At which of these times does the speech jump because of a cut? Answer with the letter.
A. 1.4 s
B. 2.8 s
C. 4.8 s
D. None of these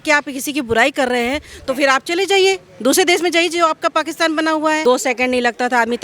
C